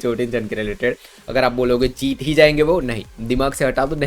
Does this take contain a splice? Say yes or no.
yes